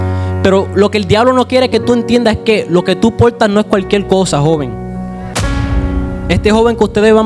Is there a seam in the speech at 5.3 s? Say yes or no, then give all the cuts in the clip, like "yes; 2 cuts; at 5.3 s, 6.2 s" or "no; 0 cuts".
yes; 1 cut; at 5.3 s